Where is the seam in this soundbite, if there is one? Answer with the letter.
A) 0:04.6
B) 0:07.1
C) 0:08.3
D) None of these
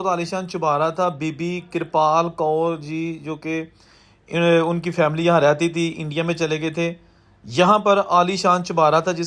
D